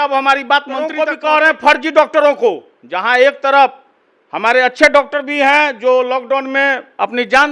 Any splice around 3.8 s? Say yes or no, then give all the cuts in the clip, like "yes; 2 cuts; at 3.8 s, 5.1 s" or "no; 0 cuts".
no; 1 cut; at 0.9 s